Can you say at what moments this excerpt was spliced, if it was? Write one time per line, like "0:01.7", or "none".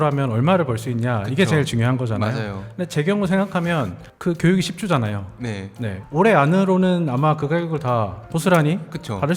0:05.9

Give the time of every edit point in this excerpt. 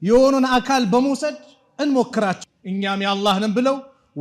0:02.4

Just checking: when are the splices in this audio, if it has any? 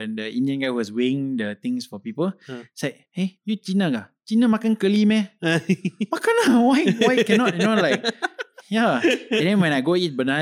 0:03.3

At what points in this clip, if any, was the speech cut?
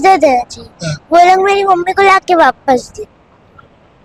none

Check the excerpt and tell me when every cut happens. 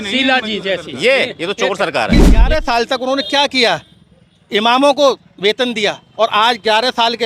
0:02.5

